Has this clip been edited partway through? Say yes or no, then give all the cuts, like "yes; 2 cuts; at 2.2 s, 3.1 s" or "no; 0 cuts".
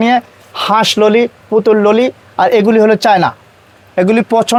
no; 0 cuts